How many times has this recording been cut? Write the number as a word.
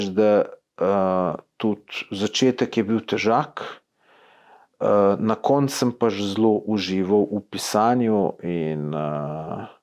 zero